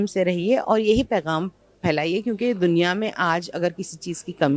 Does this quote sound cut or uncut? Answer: uncut